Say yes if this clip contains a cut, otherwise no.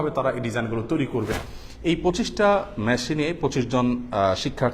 yes